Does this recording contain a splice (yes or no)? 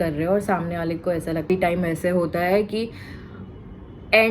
yes